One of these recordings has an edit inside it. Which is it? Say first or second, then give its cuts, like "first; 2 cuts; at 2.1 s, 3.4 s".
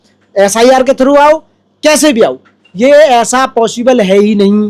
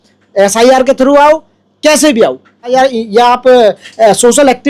second; 1 cut; at 2.7 s